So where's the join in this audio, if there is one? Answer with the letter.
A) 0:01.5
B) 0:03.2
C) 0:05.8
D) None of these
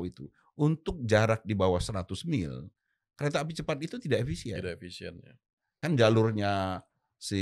C